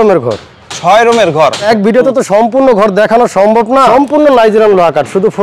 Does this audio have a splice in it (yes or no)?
yes